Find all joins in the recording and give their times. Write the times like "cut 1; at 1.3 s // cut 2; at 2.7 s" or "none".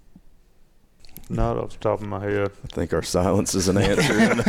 cut 1; at 1.0 s